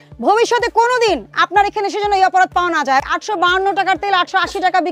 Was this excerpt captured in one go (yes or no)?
no